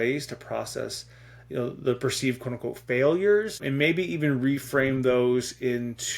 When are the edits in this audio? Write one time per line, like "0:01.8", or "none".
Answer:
0:03.6

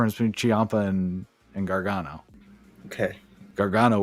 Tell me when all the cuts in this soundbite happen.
none

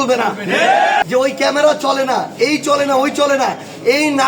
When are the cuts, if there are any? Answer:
0:01.0

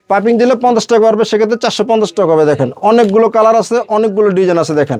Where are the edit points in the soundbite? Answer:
none

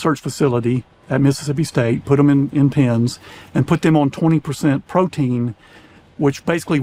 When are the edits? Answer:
none

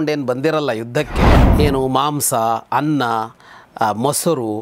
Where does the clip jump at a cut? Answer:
0:01.5

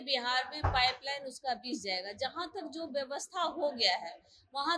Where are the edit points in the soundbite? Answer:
none

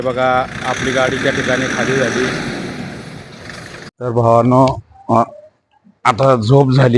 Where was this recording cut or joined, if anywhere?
0:03.9

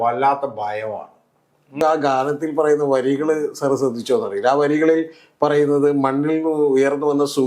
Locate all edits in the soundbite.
0:01.8

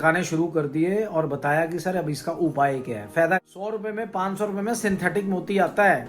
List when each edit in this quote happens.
0:03.4

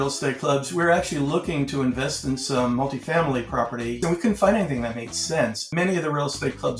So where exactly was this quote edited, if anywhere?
0:04.0
0:05.7

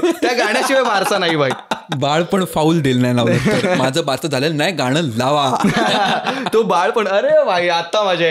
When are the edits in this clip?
0:01.9

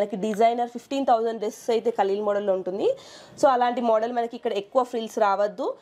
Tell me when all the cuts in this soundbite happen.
none

